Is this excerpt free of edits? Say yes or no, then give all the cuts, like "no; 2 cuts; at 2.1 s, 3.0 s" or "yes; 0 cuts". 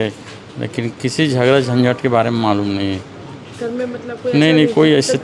yes; 0 cuts